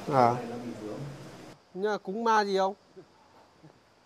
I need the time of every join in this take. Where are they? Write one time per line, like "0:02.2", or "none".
0:01.5